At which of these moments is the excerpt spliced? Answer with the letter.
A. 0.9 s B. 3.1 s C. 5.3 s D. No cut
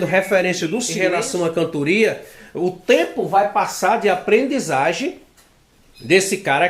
A